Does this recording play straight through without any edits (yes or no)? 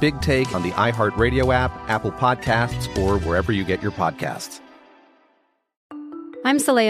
no